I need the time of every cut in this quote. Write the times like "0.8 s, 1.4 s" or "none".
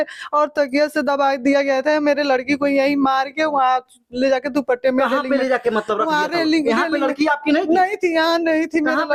none